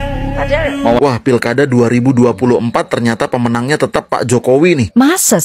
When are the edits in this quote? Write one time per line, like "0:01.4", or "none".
0:00.9